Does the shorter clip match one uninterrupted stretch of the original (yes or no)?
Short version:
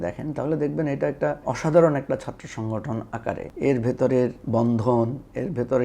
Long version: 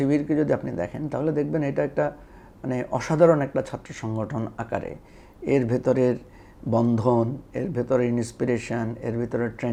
no